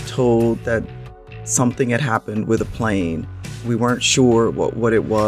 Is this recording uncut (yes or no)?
yes